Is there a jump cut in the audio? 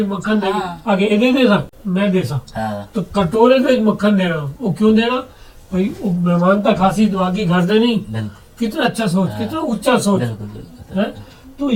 no; 0 cuts

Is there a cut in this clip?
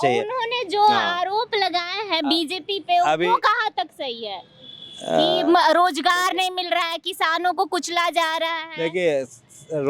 no; 0 cuts

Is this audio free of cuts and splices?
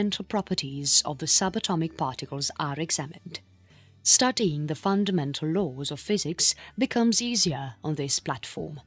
yes; 0 cuts

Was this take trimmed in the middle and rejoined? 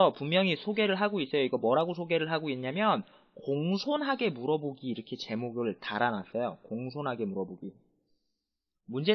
no; 0 cuts

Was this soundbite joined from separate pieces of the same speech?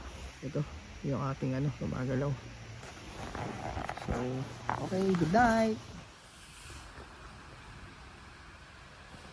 no; 0 cuts

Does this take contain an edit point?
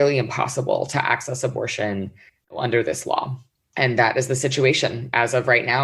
no; 0 cuts

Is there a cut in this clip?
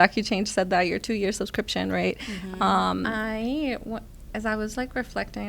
yes; 1 cut; at 3.1 s

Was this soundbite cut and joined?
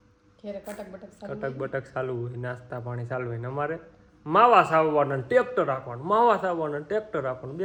no; 0 cuts

